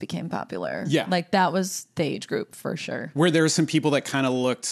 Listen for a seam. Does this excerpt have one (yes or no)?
no